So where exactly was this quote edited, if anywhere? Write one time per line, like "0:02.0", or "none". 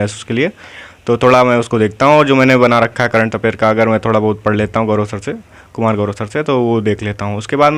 none